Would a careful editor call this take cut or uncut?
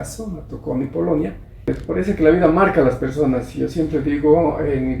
cut